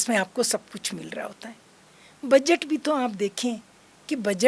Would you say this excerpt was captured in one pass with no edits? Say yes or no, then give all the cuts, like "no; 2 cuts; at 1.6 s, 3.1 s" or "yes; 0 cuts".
yes; 0 cuts